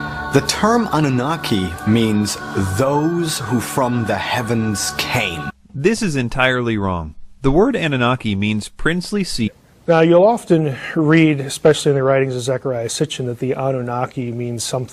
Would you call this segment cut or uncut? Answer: uncut